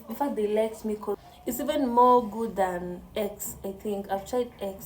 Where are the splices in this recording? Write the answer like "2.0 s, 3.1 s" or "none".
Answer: 1.3 s